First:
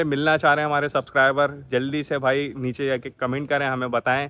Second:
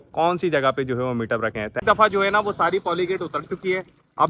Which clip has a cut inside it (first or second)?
second